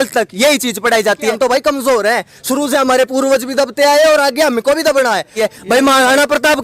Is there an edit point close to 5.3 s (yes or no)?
yes